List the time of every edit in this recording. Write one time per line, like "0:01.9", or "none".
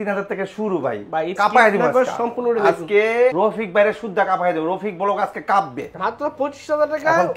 0:01.4
0:05.8